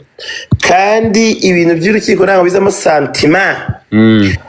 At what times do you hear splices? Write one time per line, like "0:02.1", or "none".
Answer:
none

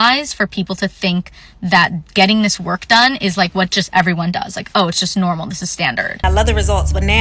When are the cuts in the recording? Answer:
0:06.2

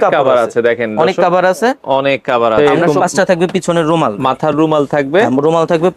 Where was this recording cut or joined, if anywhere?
0:02.8

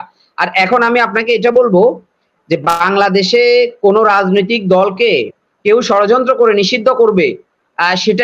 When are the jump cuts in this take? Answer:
none

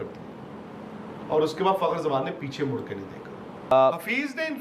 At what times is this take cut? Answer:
0:03.7

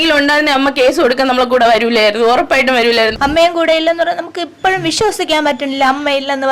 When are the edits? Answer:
0:03.1

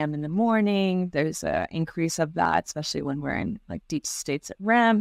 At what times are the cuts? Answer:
none

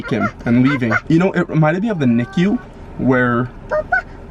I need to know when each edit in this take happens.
0:01.0

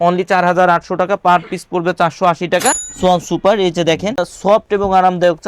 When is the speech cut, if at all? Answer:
0:02.9
0:04.3

